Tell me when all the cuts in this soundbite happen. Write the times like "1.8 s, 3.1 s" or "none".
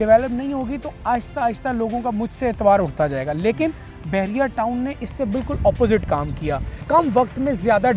6.7 s